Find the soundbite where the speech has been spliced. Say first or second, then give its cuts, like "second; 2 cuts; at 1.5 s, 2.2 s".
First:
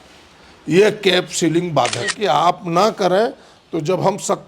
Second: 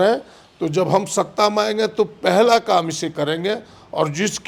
first; 1 cut; at 2.1 s